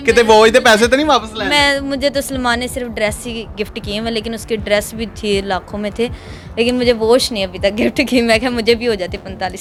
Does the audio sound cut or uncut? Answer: uncut